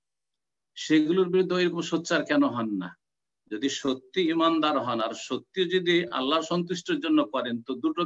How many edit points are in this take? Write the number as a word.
zero